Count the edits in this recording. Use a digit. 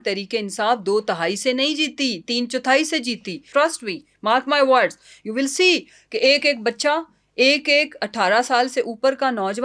1